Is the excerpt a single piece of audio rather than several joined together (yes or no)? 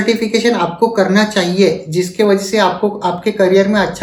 yes